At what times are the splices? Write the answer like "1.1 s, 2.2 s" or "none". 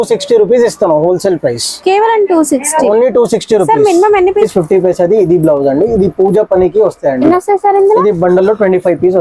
4.4 s, 7.2 s